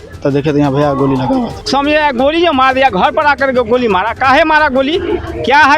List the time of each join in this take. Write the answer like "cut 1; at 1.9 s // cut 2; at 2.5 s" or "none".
cut 1; at 1.7 s